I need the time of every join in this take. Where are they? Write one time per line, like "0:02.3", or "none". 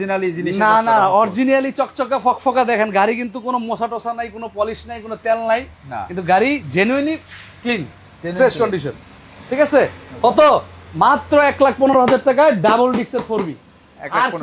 none